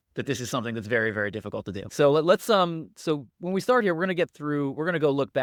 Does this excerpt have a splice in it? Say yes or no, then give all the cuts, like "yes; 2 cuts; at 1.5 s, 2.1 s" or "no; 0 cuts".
no; 0 cuts